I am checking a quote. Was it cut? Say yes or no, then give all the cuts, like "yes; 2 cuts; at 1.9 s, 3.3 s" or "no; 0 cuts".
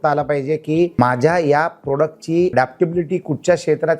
yes; 2 cuts; at 1.0 s, 2.5 s